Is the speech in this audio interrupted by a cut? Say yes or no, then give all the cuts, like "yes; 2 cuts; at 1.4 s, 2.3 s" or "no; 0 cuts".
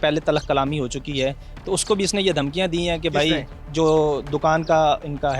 no; 0 cuts